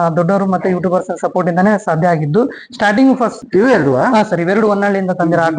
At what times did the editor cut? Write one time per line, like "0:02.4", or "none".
0:03.3